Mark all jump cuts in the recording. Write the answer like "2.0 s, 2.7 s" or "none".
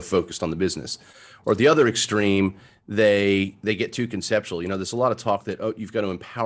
none